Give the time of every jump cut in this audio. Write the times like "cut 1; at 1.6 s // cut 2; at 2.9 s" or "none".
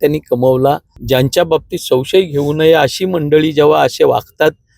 cut 1; at 0.9 s